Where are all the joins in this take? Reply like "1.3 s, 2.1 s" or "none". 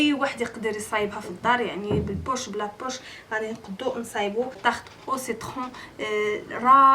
4.6 s